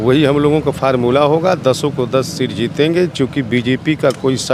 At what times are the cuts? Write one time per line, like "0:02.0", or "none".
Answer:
none